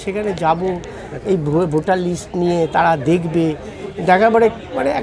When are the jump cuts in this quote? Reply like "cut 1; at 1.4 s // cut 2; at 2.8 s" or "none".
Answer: none